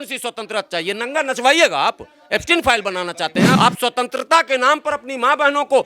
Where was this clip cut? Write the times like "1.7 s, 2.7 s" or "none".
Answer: 3.6 s